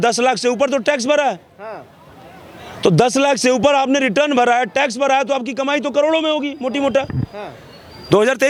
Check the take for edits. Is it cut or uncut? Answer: uncut